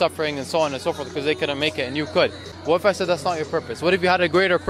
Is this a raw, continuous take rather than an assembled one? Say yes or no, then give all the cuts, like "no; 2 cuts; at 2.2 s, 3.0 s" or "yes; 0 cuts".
no; 1 cut; at 2.7 s